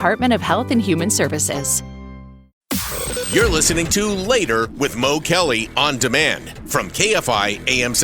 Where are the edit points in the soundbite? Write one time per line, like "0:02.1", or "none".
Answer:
0:02.6